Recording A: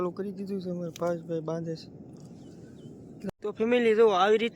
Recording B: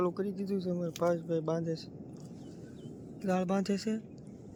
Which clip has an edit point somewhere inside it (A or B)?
A